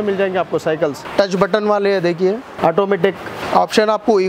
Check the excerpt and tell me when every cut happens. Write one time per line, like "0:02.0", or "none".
0:01.0
0:02.5
0:03.4